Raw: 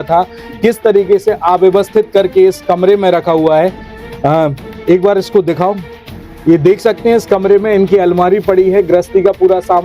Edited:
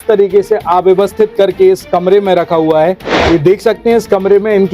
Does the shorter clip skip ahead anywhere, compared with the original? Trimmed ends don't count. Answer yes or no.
yes